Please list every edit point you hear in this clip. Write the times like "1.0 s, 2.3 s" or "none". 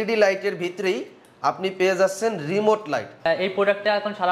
3.2 s